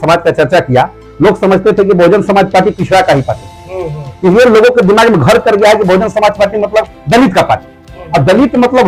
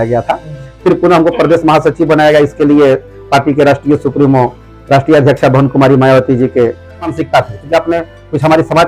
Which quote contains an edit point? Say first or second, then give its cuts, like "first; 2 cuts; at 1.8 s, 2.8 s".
second; 1 cut; at 7.1 s